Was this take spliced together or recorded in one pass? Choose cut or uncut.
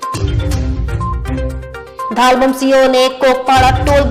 cut